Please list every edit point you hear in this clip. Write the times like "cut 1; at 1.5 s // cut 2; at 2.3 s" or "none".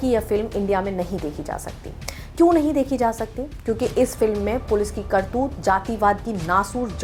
none